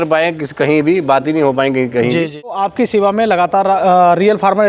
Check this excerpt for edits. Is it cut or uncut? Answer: cut